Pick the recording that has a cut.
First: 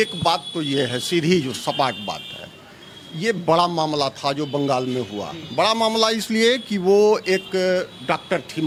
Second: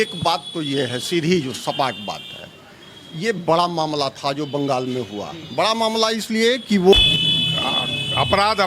second; 1 cut; at 6.9 s

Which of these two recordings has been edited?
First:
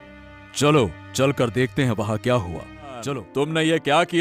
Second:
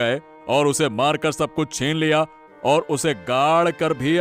first; 1 cut; at 3.2 s

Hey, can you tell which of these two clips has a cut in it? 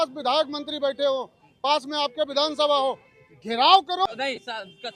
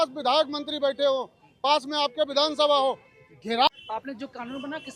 second; 1 cut; at 3.7 s

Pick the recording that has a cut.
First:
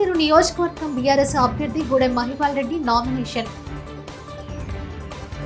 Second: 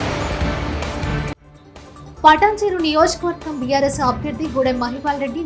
second; 1 cut; at 1.5 s

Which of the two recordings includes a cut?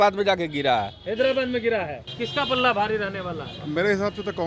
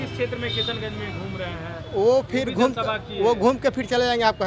first; 1 cut; at 2.0 s

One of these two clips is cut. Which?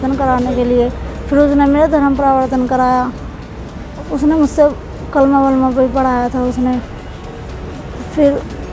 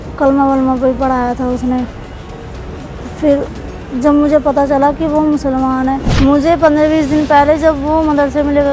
second; 1 cut; at 6.1 s

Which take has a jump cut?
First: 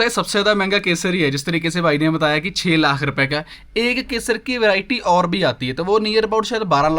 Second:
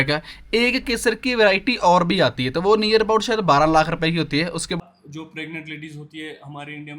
second; 1 cut; at 4.8 s

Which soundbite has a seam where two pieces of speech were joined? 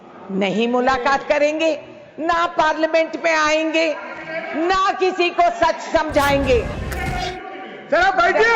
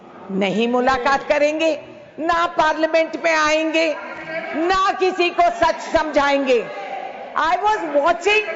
first; 1 cut; at 6.8 s

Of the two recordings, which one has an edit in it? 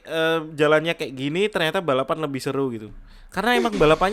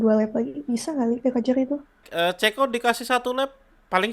second; 1 cut; at 2.1 s

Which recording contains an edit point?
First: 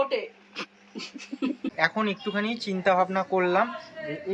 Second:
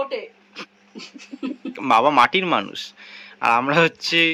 first; 1 cut; at 1.4 s

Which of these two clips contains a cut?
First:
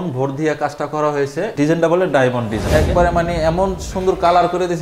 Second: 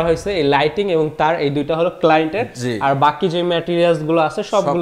first; 1 cut; at 2.6 s

